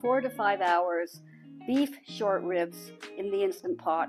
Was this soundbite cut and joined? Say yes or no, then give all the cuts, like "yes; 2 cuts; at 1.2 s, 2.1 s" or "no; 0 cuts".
no; 0 cuts